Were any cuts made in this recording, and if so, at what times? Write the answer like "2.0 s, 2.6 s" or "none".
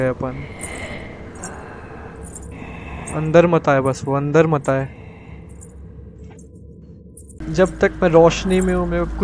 7.4 s